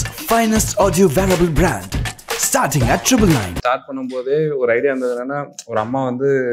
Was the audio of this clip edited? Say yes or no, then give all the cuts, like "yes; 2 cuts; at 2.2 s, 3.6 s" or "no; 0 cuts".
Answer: yes; 1 cut; at 3.6 s